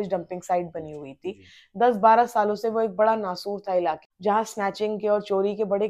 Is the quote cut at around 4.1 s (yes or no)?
yes